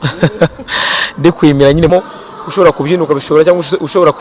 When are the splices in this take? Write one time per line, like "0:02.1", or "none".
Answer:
0:01.9